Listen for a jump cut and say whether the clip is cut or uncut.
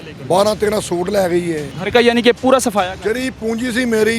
cut